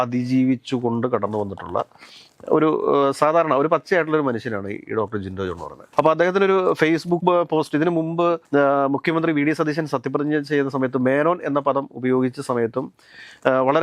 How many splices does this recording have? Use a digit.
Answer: 0